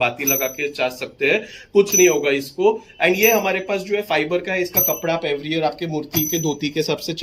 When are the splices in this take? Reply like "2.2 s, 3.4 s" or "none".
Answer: none